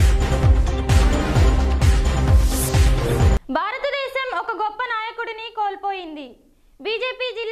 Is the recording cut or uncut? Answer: uncut